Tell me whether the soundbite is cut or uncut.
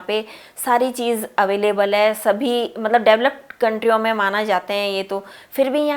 uncut